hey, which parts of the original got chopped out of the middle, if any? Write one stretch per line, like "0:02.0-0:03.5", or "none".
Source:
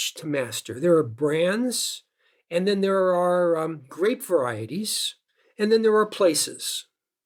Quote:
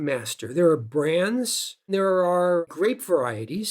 0:02.1-0:02.8
0:03.6-0:03.9